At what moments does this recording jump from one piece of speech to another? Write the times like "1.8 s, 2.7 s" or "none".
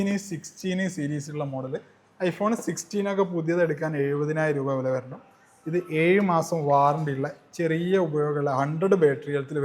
none

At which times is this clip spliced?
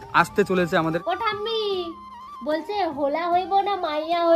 1.0 s

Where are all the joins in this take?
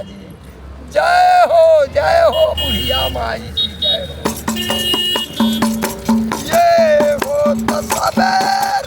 none

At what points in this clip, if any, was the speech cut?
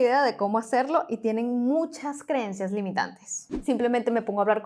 3.5 s

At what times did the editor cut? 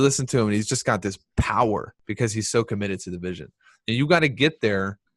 2.0 s

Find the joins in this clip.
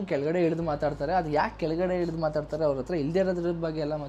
none

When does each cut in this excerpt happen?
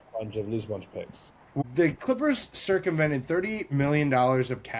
1.5 s

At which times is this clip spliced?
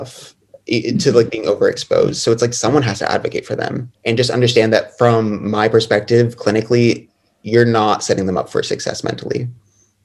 3.9 s

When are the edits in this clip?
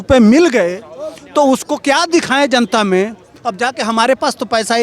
3.3 s

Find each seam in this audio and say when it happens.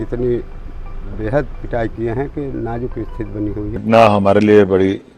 3.7 s

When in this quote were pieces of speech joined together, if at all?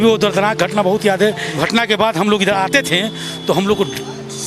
1.5 s

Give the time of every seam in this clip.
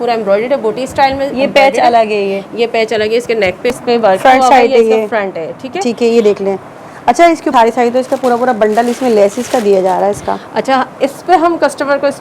3.8 s, 7.5 s

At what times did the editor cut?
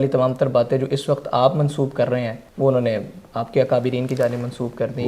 2.4 s

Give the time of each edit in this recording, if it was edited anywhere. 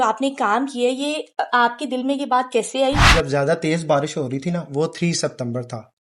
3.1 s

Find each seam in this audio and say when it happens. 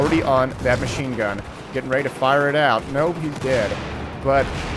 3.5 s

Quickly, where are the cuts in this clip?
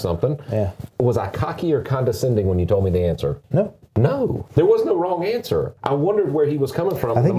0.9 s, 3.4 s, 4.4 s, 5.7 s

